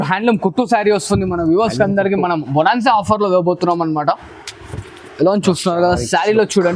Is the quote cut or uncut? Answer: uncut